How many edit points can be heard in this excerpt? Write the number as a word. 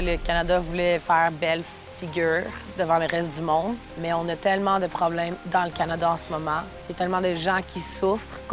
three